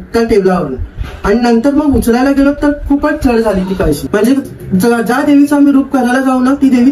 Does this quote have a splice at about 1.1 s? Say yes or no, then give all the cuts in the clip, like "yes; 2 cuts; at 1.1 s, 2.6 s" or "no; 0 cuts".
no; 1 cut; at 4.0 s